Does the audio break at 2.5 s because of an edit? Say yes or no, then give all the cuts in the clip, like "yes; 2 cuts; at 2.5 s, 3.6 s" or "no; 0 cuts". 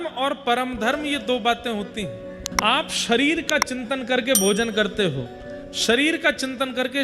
yes; 1 cut; at 2.5 s